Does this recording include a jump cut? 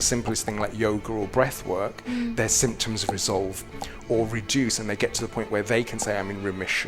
no; 0 cuts

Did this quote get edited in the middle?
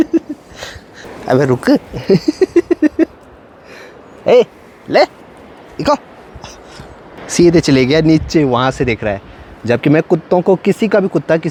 no; 0 cuts

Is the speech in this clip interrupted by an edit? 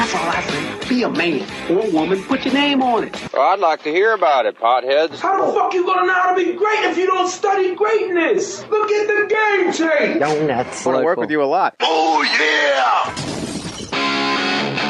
no; 0 cuts

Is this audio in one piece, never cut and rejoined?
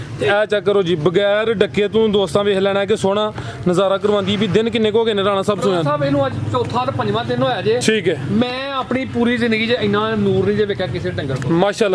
yes; 0 cuts

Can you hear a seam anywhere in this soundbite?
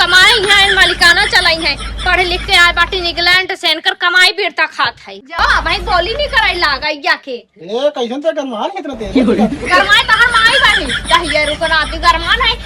yes; 1 cut; at 5.4 s

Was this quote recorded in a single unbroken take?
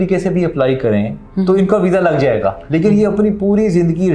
no; 1 cut; at 2.6 s

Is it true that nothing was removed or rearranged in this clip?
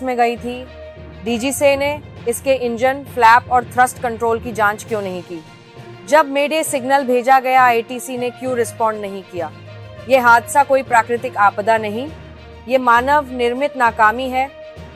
yes; 0 cuts

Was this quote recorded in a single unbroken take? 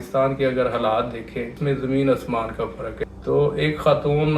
no; 2 cuts; at 1.5 s, 3.0 s

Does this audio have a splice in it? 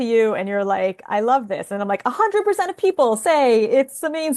no; 0 cuts

